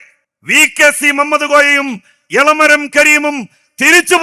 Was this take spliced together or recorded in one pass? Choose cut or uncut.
uncut